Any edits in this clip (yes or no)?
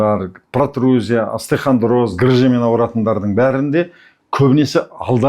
no